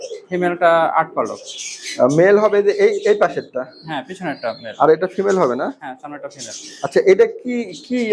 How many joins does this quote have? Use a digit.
0